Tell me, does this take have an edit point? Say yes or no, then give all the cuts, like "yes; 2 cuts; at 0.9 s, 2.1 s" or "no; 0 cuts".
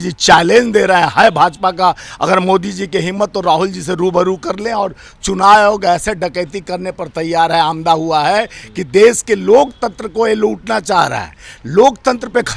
no; 0 cuts